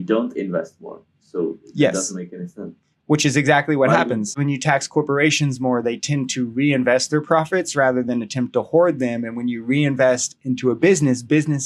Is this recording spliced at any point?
yes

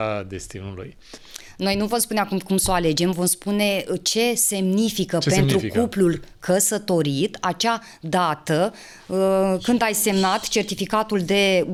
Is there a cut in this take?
no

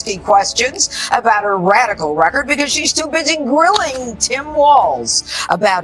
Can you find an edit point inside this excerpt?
no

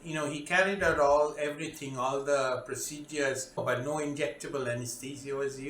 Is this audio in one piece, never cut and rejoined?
no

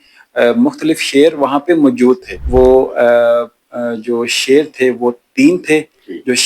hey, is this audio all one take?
no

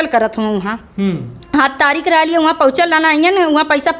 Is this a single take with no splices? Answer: yes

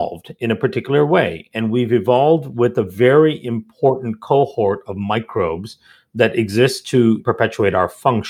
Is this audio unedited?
no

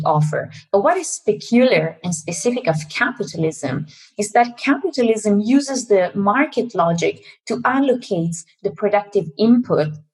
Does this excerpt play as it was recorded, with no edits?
yes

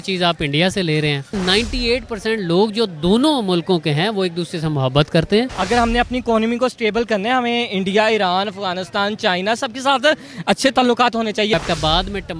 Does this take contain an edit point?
yes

